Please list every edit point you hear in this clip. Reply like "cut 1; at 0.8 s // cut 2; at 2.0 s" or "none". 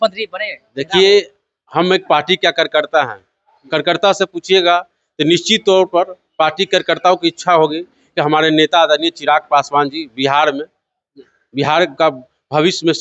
none